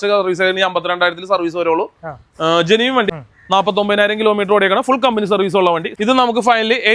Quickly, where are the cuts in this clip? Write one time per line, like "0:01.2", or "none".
0:03.1
0:05.9

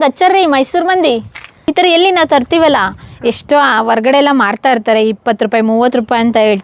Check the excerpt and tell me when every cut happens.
0:01.5

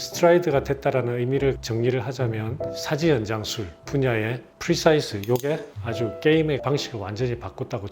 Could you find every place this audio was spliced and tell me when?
0:01.6

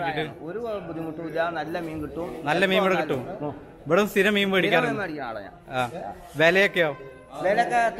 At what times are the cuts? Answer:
none

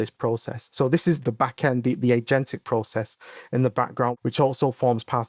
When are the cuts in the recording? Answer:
0:01.1
0:04.2

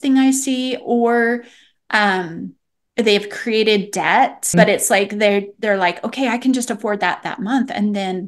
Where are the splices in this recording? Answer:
0:04.5

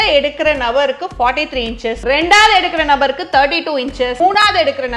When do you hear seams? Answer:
0:02.0
0:04.2

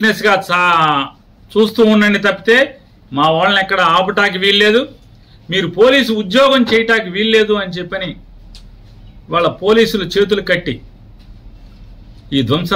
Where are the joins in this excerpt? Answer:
none

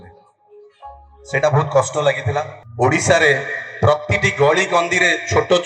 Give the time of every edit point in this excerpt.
0:02.6

